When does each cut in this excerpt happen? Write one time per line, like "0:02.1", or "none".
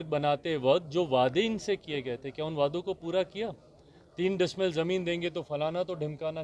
none